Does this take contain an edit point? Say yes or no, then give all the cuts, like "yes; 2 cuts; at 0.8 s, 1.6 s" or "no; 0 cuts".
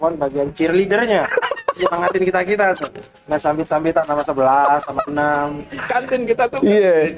yes; 1 cut; at 5.8 s